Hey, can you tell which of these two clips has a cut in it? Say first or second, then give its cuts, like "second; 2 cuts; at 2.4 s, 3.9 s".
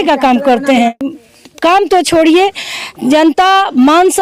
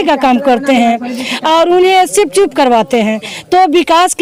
first; 1 cut; at 1.2 s